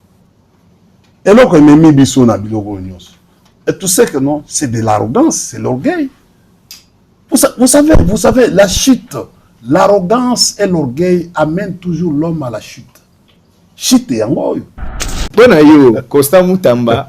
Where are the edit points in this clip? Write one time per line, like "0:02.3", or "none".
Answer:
0:15.0